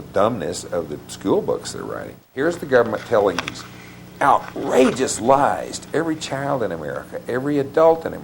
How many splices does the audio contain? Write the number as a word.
one